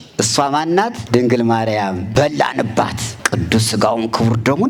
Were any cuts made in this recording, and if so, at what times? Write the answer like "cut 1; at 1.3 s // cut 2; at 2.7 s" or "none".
cut 1; at 1.0 s // cut 2; at 2.1 s // cut 3; at 3.1 s